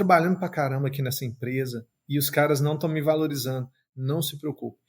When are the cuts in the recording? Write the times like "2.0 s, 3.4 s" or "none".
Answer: 1.9 s